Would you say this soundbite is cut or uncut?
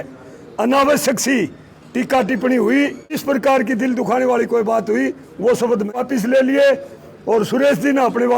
cut